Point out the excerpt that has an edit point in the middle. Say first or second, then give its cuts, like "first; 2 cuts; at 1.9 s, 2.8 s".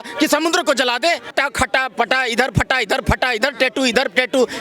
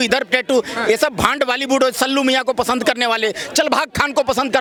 first; 1 cut; at 1.3 s